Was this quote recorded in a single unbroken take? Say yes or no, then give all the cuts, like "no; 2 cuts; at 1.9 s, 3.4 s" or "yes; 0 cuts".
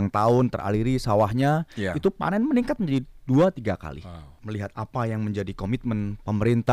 no; 1 cut; at 4.3 s